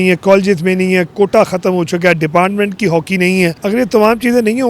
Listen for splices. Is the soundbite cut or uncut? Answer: cut